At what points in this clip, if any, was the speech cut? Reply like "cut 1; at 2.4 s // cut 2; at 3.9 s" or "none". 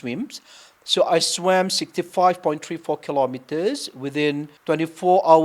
cut 1; at 4.5 s